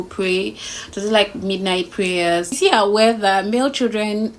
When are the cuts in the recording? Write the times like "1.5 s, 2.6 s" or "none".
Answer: 2.6 s

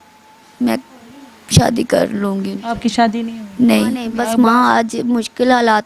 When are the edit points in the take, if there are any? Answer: 4.1 s

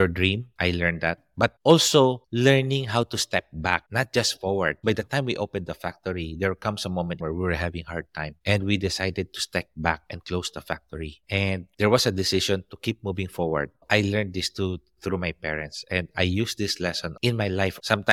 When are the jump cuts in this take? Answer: 4.8 s, 7.2 s, 13.8 s, 17.1 s

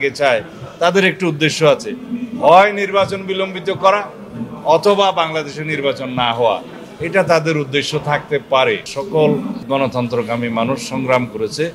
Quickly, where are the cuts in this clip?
8.9 s, 9.6 s

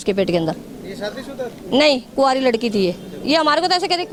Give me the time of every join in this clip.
none

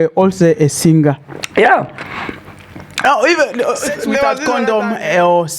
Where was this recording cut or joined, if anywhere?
4.3 s

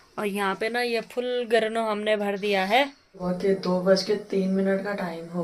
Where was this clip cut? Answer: 3.1 s

